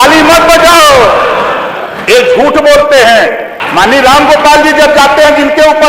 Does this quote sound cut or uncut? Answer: cut